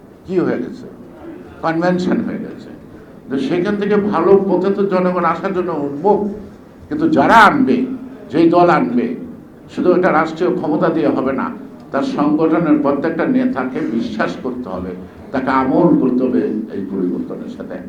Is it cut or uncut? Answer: uncut